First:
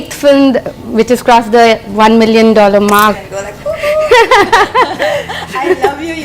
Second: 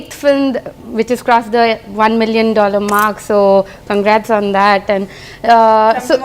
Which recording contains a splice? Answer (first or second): first